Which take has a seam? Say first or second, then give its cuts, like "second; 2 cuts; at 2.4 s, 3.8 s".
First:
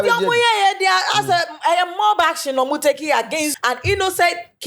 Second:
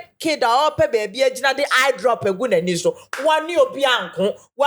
first; 1 cut; at 3.5 s